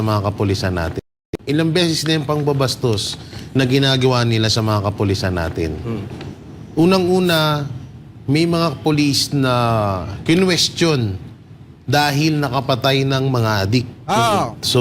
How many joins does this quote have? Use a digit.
1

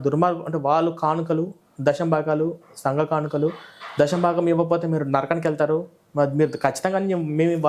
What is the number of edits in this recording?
0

